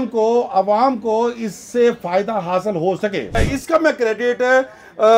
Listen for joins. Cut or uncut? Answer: cut